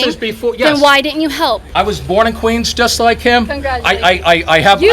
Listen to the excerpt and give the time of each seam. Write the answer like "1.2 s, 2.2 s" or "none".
1.7 s

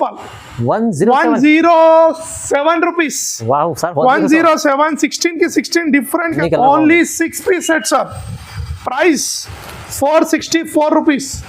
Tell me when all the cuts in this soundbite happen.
6.4 s

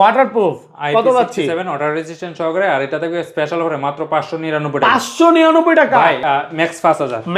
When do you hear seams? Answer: 6.2 s

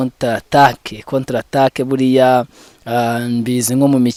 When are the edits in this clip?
none

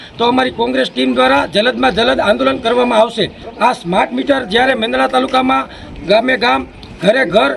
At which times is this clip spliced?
3.4 s

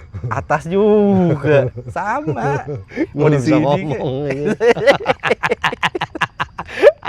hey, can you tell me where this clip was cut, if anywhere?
none

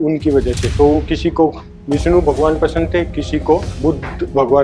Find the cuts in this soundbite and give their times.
3.7 s

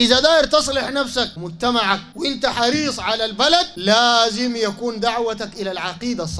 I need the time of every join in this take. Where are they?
1.4 s, 2.1 s, 3.7 s

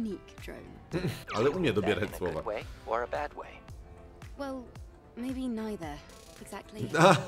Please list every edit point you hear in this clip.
1.2 s

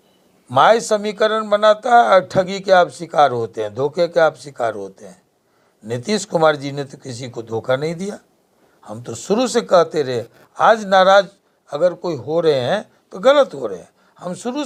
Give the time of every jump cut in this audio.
none

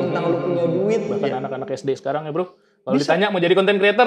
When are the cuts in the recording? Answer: 1.2 s

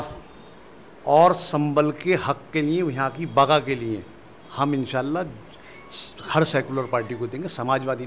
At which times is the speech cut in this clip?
none

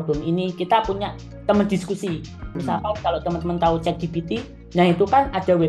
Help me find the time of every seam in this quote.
2.6 s

